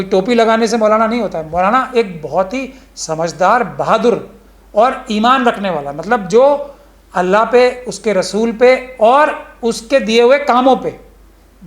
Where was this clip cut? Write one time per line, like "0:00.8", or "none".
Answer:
none